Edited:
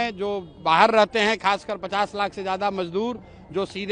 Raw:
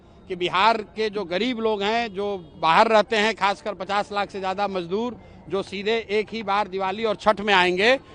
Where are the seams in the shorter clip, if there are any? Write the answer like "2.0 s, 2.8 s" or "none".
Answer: none

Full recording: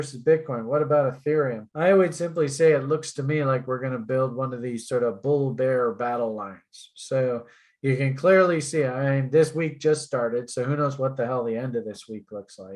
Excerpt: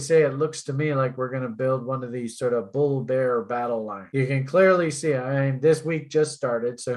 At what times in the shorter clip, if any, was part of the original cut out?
4.0 s

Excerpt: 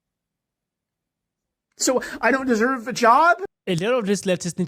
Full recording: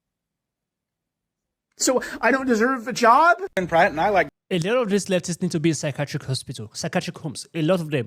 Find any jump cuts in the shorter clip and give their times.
3.5 s

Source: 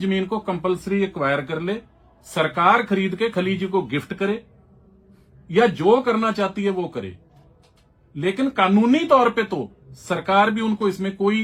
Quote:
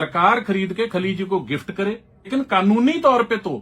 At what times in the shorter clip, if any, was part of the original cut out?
2.3 s

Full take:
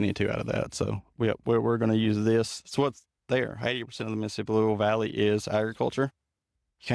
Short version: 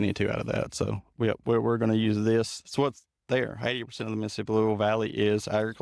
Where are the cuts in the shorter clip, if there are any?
none

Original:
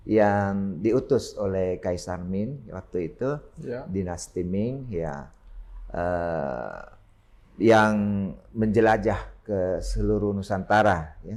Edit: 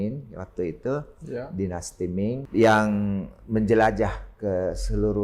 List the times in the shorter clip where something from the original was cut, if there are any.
2.4 s

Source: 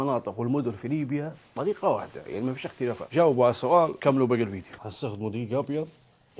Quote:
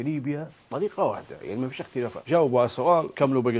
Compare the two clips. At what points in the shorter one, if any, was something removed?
none

